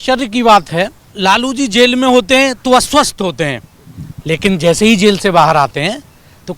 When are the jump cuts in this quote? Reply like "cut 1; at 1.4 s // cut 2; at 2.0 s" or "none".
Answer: cut 1; at 1.0 s